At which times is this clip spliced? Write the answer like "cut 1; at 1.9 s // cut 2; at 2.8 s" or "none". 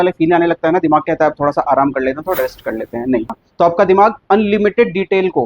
cut 1; at 3.4 s